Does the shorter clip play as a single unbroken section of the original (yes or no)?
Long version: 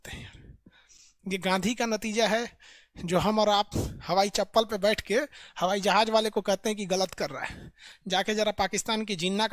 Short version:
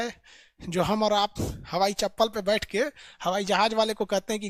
yes